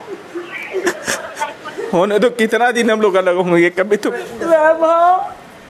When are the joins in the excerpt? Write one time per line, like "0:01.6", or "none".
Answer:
0:04.1